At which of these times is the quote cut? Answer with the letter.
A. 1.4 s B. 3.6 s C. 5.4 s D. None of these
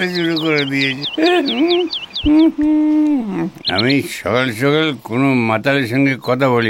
B